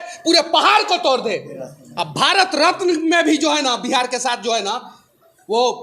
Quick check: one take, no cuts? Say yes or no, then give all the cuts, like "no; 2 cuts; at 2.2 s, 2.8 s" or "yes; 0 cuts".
yes; 0 cuts